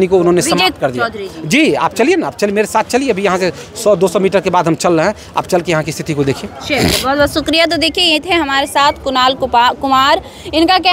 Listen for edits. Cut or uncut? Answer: uncut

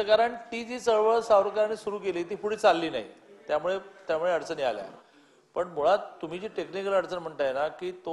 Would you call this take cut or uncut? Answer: uncut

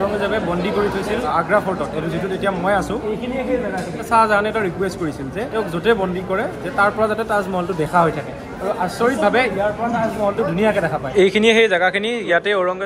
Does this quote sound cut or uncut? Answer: cut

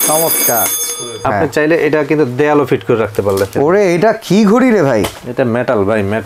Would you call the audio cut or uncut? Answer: cut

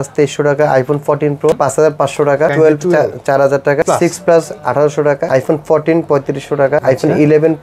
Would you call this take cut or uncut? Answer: cut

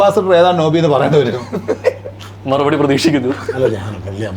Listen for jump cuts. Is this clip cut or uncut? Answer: uncut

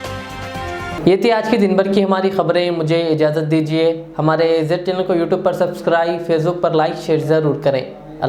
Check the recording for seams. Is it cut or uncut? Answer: uncut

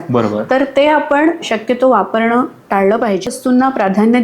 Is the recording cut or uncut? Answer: cut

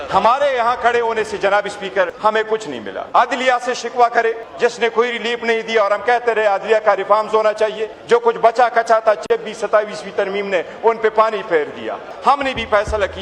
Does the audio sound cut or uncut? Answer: cut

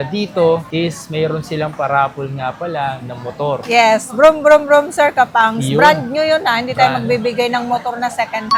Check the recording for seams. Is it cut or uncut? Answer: uncut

